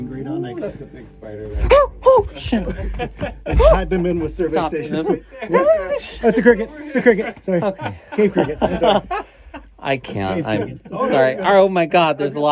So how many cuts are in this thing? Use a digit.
0